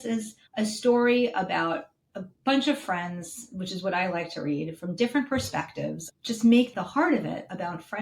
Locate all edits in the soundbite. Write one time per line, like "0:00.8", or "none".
0:06.1